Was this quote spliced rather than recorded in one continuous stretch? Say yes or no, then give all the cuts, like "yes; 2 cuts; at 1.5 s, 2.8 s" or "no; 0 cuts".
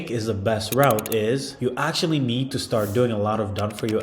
yes; 1 cut; at 1.5 s